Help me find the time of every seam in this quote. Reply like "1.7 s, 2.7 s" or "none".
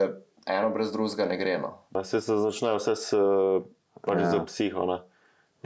1.9 s